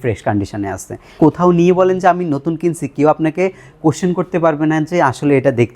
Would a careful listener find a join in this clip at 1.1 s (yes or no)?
yes